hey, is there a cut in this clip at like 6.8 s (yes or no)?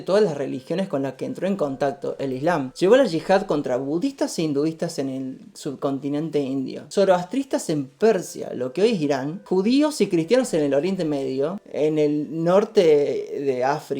yes